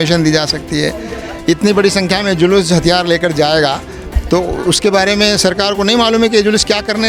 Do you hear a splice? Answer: no; 0 cuts

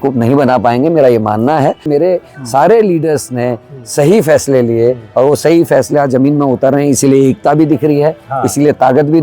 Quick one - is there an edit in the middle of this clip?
yes; 1 cut; at 1.9 s

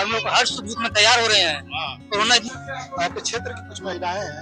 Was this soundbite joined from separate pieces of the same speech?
yes; 1 cut; at 2.5 s

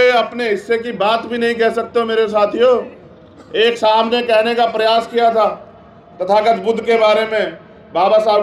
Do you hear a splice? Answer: no; 0 cuts

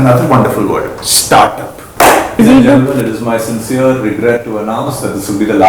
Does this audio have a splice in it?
yes; 1 cut; at 2.4 s

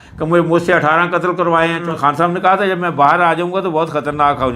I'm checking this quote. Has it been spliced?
yes; 1 cut; at 1.8 s

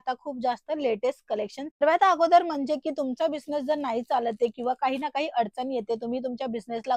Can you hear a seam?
yes; 1 cut; at 1.8 s

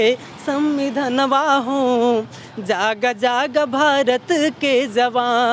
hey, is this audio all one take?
yes; 0 cuts

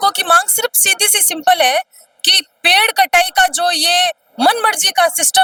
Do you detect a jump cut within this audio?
no; 0 cuts

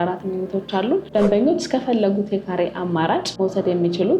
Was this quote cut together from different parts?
yes; 2 cuts; at 1.1 s, 3.3 s

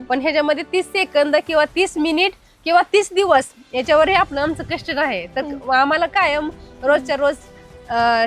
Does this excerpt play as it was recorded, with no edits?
yes; 0 cuts

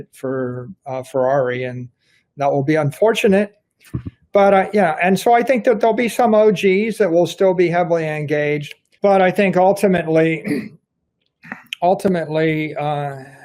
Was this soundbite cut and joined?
no; 0 cuts

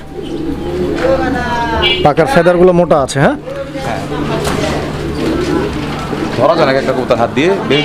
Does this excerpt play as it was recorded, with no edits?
yes; 0 cuts

